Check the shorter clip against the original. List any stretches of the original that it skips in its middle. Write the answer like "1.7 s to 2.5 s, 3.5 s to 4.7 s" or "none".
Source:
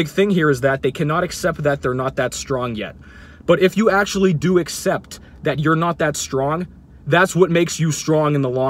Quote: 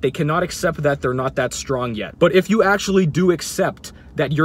2.8 s to 3.3 s